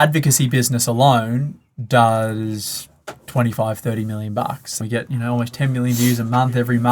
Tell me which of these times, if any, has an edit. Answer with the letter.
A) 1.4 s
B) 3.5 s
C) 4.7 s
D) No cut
C